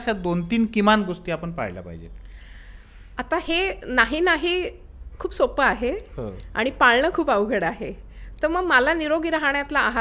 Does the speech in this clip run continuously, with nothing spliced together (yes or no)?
yes